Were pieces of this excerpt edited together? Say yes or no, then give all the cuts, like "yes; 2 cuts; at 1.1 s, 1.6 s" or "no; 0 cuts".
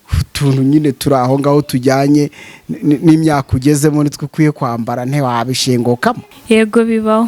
yes; 1 cut; at 6.3 s